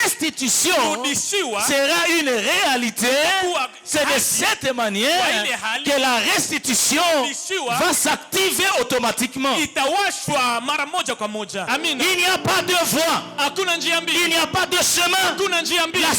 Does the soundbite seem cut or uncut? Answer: cut